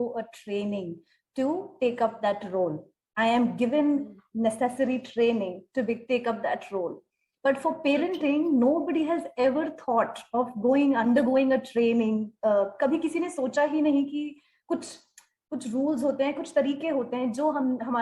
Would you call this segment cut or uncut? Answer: uncut